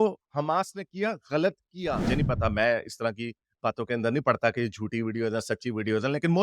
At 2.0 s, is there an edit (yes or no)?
yes